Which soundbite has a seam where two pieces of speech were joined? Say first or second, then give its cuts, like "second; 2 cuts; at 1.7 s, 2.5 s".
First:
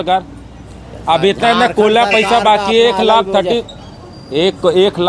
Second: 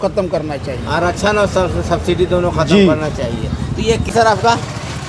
second; 1 cut; at 4.1 s